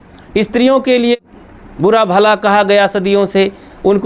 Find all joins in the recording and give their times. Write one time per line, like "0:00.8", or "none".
0:01.2